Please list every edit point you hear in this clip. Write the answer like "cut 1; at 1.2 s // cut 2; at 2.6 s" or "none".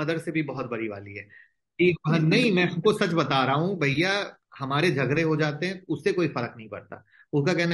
none